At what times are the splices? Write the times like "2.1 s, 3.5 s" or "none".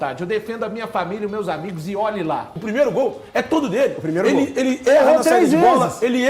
2.5 s